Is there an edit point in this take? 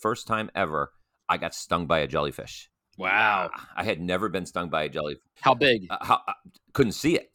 yes; 1 cut; at 5.2 s

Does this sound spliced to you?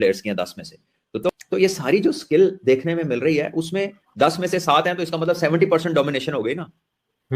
yes; 1 cut; at 1.3 s

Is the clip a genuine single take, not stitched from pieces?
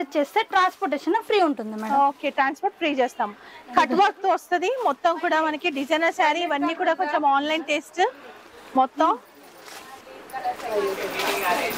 yes; 0 cuts

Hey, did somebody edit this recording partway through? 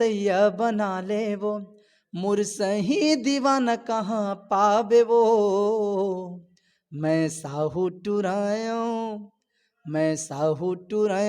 no; 0 cuts

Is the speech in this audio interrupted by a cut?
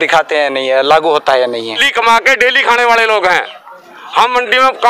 yes; 1 cut; at 1.9 s

